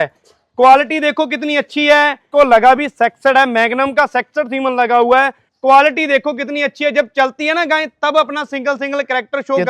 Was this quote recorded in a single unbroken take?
no; 2 cuts; at 2.3 s, 5.4 s

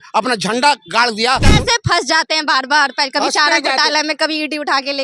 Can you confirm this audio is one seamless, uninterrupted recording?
no; 1 cut; at 1.5 s

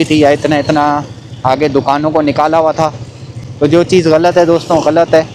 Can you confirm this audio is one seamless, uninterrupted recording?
yes; 0 cuts

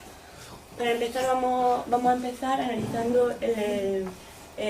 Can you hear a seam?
yes; 1 cut; at 1.1 s

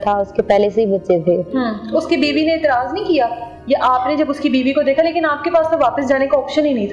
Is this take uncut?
yes; 0 cuts

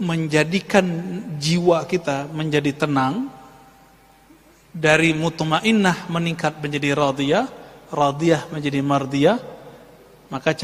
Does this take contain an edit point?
no; 0 cuts

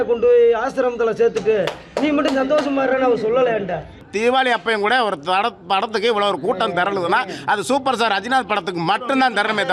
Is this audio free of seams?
no; 1 cut; at 4.0 s

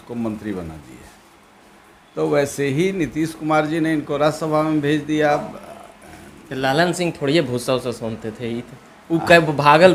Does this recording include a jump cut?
no; 0 cuts

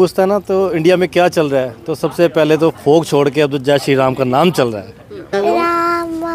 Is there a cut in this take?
yes; 1 cut; at 5.3 s

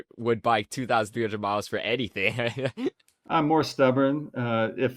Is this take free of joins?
no; 1 cut; at 3.1 s

